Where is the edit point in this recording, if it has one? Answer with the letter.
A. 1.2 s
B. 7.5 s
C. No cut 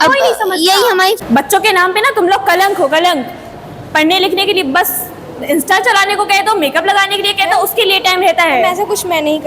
A